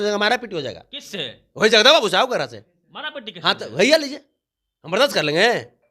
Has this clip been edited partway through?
no; 0 cuts

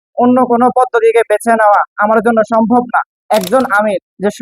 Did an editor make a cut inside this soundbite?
yes; 1 cut; at 3.2 s

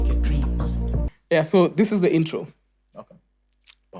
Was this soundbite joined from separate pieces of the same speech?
yes; 1 cut; at 1.1 s

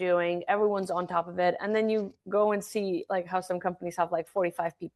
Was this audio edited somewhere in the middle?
no; 0 cuts

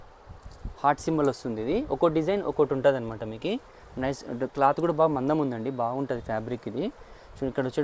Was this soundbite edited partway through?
no; 0 cuts

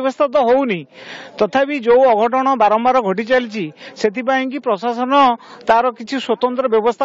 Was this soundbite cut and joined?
no; 0 cuts

